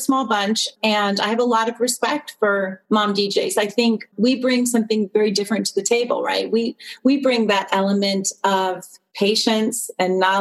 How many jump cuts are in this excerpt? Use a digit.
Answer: 0